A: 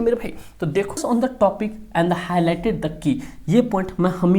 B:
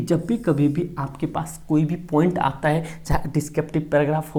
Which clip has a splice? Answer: A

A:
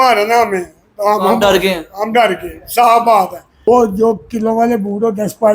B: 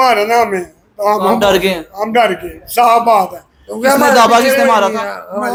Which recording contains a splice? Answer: A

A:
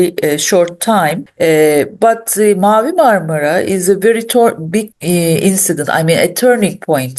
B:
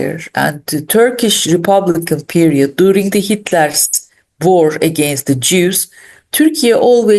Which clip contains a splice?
A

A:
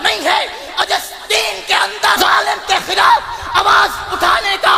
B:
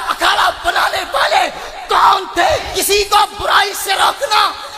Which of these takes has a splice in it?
B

